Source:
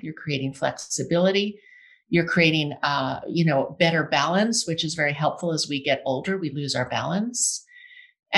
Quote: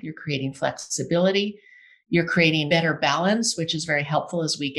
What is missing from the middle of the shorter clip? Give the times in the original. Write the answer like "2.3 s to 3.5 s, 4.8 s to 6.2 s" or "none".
2.7 s to 3.8 s